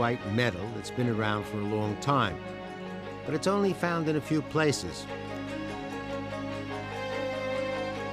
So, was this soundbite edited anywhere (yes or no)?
no